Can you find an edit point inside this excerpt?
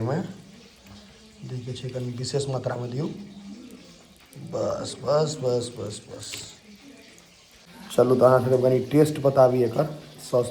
no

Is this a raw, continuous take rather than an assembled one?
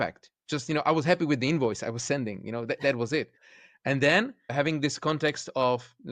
no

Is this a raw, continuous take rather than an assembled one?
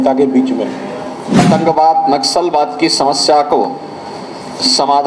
no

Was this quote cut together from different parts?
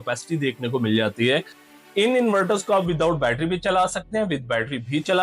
yes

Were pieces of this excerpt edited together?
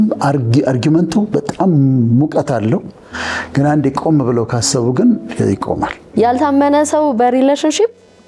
yes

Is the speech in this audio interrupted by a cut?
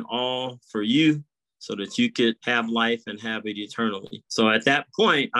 yes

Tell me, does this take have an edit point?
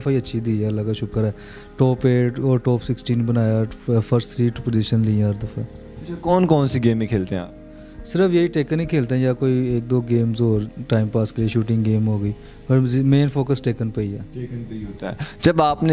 no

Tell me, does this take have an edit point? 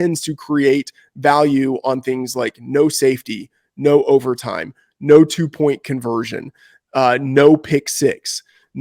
no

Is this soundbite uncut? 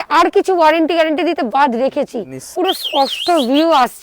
no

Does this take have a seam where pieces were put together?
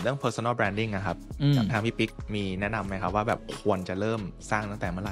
no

